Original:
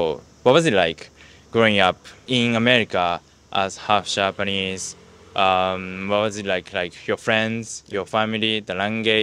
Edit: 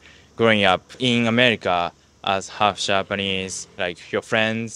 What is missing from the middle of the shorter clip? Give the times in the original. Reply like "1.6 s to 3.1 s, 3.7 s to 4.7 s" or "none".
2.1 s to 2.2 s, 5.0 s to 6.7 s